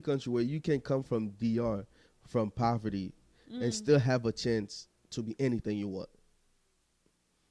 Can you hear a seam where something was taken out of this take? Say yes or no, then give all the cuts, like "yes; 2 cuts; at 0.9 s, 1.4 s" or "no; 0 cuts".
no; 0 cuts